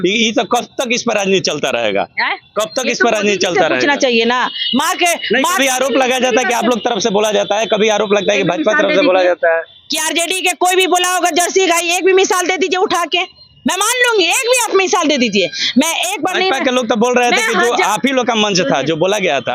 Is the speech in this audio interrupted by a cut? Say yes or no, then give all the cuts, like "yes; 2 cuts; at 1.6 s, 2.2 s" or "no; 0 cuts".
no; 0 cuts